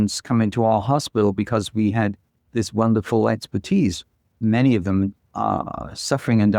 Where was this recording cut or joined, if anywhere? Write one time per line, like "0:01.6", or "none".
0:04.4